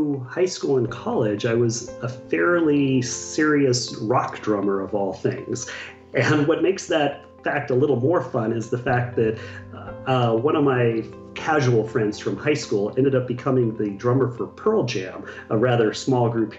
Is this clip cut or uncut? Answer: uncut